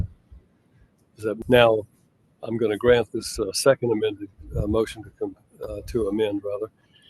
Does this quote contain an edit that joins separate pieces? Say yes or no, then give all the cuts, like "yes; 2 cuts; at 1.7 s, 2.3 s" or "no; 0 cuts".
yes; 1 cut; at 1.4 s